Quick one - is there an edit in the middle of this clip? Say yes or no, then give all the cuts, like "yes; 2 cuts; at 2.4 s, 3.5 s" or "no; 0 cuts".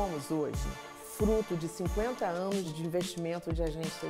yes; 1 cut; at 2.7 s